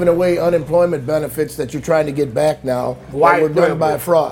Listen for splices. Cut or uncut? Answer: uncut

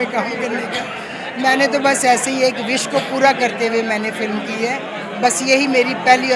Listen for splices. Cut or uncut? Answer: uncut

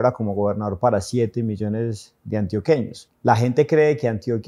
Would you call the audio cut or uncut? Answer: cut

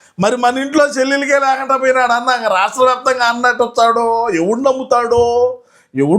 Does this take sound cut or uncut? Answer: uncut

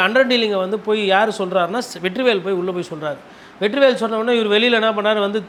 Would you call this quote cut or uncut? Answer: uncut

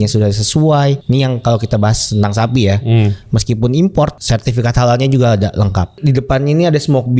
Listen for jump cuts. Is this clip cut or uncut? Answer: cut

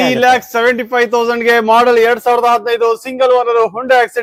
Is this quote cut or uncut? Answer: uncut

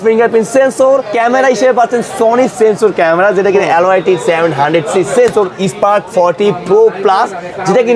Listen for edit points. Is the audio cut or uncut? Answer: cut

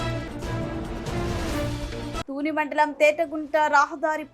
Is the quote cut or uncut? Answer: cut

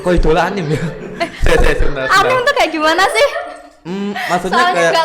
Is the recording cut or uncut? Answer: uncut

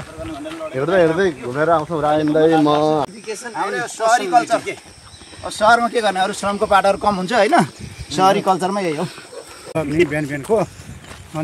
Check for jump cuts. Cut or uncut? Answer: cut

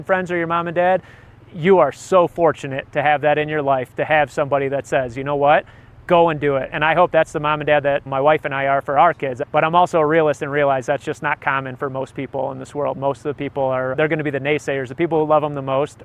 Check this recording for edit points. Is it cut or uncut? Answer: cut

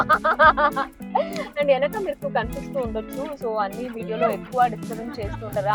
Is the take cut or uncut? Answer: uncut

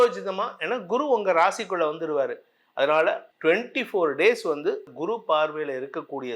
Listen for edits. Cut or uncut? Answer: cut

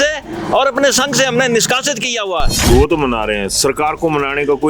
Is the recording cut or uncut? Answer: cut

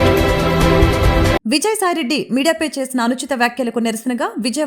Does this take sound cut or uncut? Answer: uncut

